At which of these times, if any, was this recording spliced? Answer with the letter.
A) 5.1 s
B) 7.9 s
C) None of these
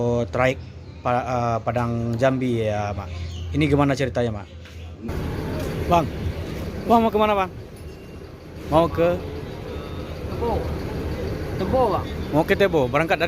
A